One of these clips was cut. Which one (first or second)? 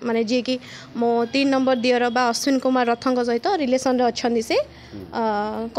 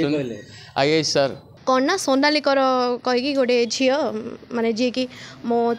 second